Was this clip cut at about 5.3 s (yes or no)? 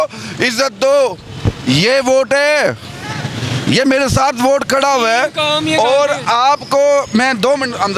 no